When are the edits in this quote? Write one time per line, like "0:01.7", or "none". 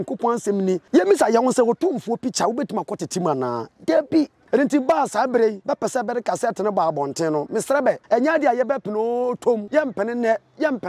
0:00.8
0:04.4
0:05.6
0:08.0
0:09.7